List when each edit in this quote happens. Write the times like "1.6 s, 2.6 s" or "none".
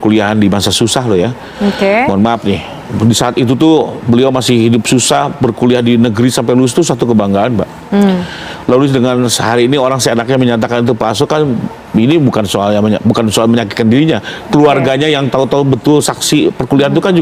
none